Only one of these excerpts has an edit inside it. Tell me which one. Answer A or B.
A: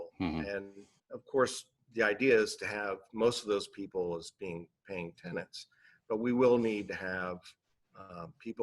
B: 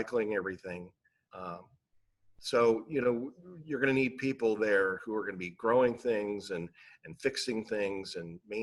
A